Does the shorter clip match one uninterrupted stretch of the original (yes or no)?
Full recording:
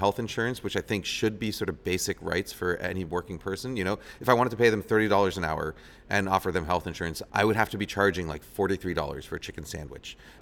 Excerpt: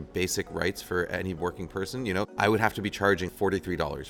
no